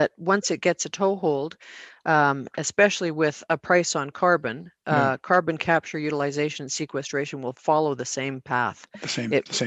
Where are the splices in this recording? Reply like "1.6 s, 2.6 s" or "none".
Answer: none